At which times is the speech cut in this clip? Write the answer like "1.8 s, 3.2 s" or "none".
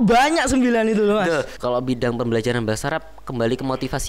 1.5 s